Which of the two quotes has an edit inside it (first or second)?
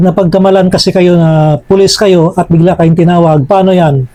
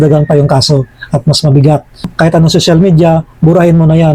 second